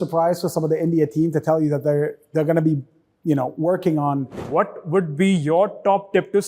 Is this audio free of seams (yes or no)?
no